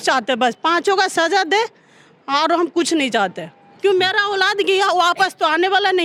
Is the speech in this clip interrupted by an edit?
no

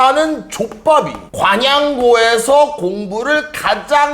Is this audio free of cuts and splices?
no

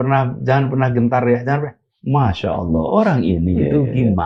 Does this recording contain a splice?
no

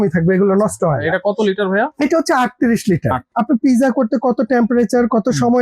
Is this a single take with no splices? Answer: no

